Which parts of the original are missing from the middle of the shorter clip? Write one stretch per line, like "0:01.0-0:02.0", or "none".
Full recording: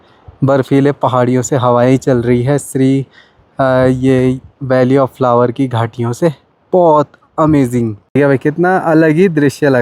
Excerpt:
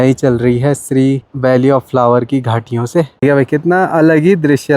0:03.1-0:04.5
0:06.4-0:08.1